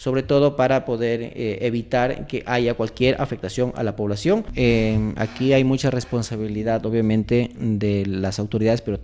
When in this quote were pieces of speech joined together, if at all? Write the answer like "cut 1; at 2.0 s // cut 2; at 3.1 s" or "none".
cut 1; at 4.5 s

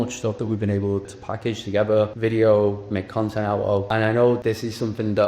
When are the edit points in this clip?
cut 1; at 1.1 s // cut 2; at 2.1 s // cut 3; at 3.9 s // cut 4; at 4.4 s

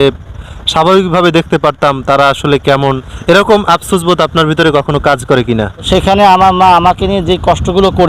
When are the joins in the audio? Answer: cut 1; at 3.1 s // cut 2; at 5.9 s

